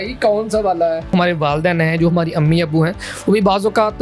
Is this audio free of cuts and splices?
no; 1 cut; at 1.1 s

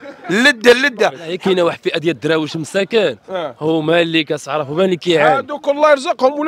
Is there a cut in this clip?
yes; 1 cut; at 1.3 s

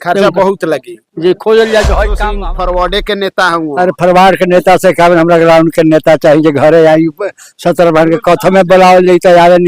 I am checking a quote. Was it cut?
yes; 1 cut; at 2.4 s

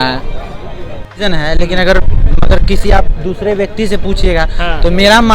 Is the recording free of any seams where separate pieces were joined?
no; 1 cut; at 1.1 s

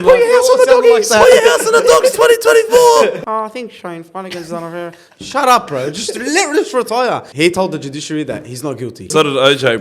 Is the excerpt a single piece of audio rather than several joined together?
no; 3 cuts; at 3.2 s, 7.3 s, 9.1 s

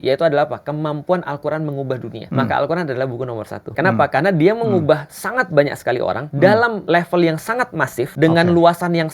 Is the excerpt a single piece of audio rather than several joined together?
no; 5 cuts; at 2.2 s, 3.7 s, 6.3 s, 6.8 s, 8.1 s

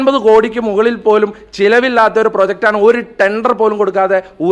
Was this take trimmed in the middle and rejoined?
no; 0 cuts

